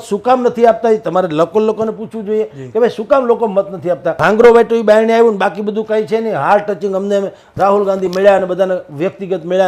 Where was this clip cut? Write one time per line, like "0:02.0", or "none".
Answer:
0:04.2